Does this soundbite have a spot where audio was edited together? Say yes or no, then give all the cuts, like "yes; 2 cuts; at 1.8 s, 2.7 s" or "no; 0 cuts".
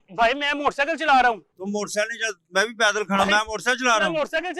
no; 0 cuts